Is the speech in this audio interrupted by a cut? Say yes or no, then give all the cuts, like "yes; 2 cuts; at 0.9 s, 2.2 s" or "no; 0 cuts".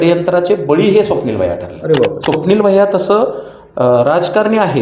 yes; 1 cut; at 2.2 s